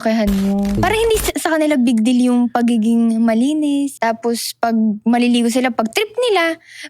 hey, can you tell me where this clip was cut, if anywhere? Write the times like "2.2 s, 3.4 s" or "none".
0.8 s, 3.9 s